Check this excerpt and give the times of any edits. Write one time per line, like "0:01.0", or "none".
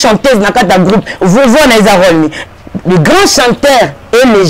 0:02.4